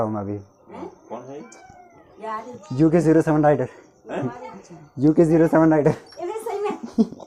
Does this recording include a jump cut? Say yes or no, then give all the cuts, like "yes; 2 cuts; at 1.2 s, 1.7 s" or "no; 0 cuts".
no; 0 cuts